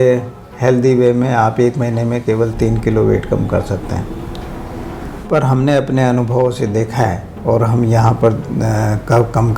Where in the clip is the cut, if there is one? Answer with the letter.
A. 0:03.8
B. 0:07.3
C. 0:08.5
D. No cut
D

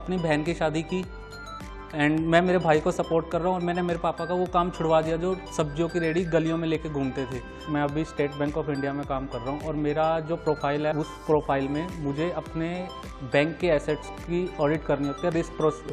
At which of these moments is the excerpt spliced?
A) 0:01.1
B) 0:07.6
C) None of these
B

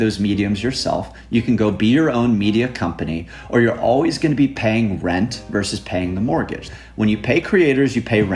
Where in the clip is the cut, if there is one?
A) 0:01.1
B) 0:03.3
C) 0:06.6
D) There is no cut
C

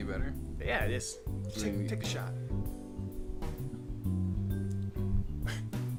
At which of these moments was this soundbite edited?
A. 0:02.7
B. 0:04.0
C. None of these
C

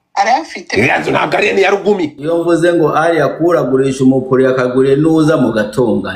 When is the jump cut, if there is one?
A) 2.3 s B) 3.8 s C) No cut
A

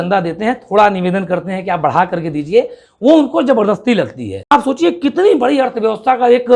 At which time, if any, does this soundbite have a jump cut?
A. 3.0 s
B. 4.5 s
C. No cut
B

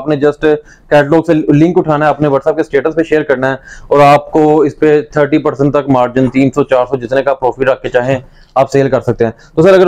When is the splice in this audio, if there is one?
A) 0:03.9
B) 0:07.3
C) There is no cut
C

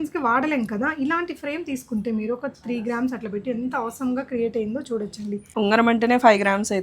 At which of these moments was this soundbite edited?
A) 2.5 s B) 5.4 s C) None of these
B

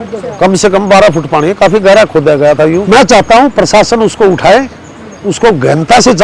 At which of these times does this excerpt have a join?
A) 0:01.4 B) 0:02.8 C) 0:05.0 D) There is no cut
B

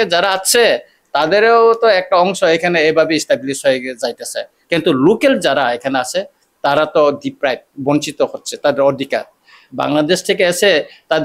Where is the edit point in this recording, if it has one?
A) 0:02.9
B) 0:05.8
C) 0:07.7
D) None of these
D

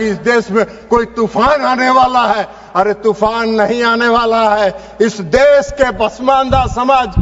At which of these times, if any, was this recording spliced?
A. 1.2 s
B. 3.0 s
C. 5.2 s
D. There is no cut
D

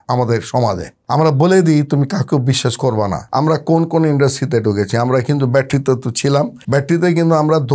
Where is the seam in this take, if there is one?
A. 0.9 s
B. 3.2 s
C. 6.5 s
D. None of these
B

